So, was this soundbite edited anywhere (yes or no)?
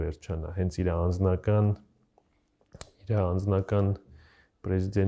no